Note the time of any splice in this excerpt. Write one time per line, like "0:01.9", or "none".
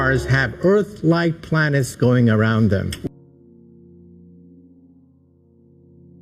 0:03.1